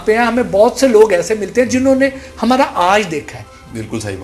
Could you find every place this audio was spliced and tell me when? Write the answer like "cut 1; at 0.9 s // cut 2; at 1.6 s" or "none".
none